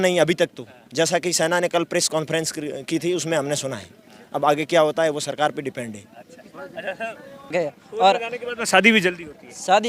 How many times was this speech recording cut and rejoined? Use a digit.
1